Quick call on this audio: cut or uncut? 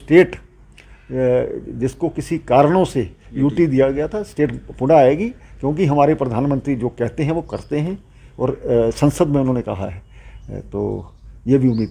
uncut